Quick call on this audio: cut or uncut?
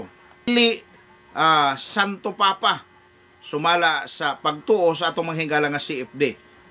uncut